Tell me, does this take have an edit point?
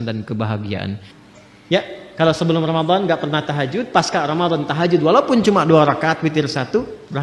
yes; 1 cut; at 1.1 s

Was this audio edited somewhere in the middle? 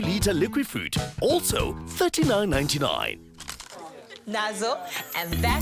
no; 0 cuts

